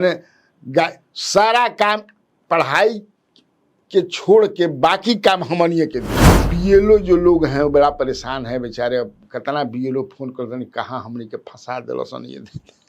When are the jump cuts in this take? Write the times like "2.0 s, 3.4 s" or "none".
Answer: 6.4 s